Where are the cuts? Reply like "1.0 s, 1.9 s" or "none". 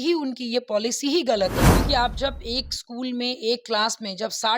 1.7 s